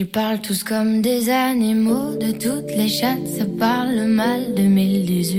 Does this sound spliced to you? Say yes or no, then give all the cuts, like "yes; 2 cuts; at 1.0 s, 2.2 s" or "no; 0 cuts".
no; 0 cuts